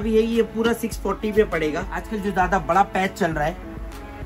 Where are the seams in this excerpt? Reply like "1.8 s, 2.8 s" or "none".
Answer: 2.0 s